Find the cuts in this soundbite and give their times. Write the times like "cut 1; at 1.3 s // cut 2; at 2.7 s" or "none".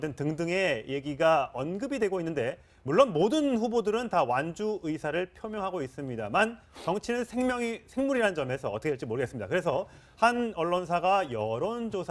cut 1; at 9.4 s